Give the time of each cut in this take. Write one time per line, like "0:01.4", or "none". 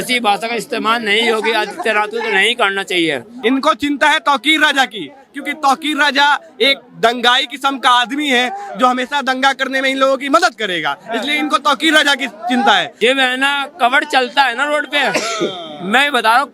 0:03.3
0:12.9